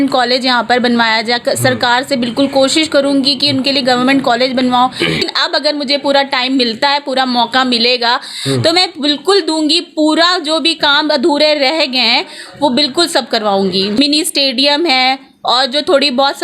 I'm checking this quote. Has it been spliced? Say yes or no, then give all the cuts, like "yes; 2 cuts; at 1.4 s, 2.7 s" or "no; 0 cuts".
yes; 2 cuts; at 5.2 s, 14.0 s